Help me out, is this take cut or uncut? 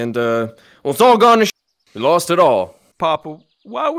cut